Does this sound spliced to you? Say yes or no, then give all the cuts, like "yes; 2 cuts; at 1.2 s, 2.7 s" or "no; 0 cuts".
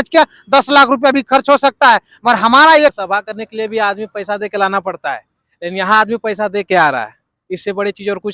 yes; 1 cut; at 2.9 s